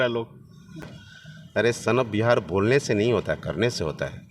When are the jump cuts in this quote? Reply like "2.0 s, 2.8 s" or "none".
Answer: 1.0 s